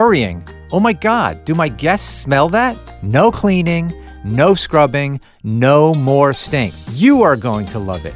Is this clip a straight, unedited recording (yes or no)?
no